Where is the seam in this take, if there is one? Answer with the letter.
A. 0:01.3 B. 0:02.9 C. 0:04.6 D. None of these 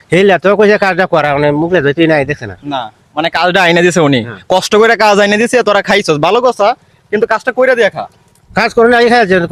D